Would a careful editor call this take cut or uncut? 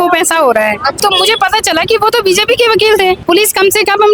cut